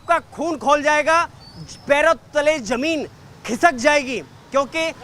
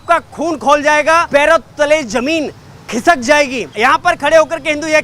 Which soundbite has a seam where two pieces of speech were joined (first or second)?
second